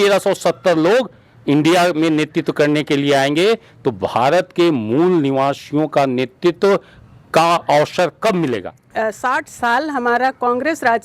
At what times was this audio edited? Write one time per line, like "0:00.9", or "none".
0:08.8

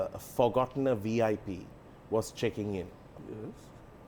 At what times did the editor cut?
0:03.1

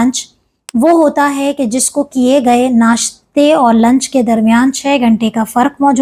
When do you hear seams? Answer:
none

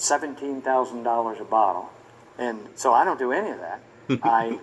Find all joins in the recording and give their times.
0:01.4

